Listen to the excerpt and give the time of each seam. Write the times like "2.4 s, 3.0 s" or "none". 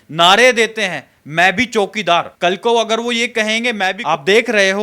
2.3 s, 4.0 s